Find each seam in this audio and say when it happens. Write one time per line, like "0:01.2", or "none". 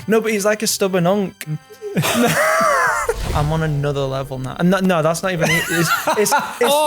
0:01.5
0:03.2